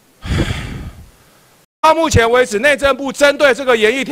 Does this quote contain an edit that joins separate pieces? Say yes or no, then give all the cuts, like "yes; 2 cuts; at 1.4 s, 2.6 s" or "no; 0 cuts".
yes; 1 cut; at 1.8 s